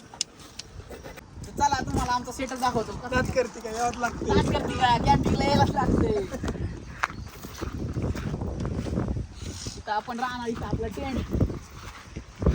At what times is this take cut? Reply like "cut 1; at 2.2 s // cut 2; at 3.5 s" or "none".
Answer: cut 1; at 1.2 s